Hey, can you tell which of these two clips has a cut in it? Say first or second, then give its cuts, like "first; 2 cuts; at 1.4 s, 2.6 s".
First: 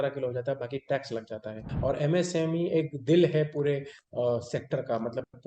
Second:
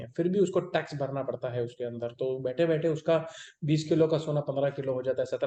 first; 1 cut; at 1.6 s